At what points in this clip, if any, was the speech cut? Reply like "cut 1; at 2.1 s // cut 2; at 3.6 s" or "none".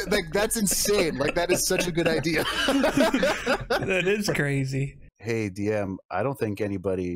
cut 1; at 5.1 s